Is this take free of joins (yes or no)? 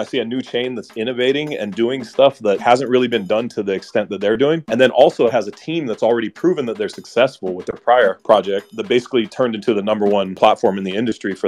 yes